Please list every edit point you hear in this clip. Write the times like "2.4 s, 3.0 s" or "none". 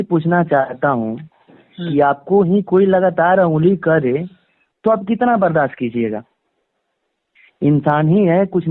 none